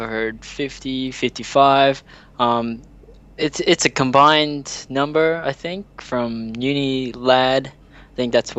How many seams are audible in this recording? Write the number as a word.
zero